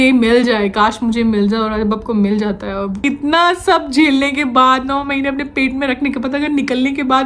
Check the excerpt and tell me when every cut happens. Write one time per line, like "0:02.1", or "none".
0:03.0